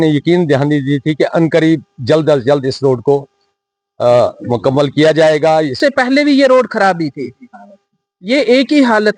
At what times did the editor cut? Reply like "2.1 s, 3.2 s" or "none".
5.7 s